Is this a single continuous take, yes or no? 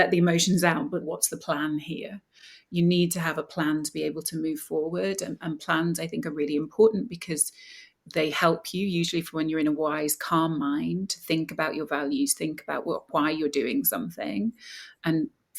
no